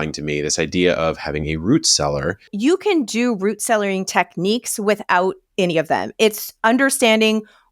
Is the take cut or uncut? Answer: cut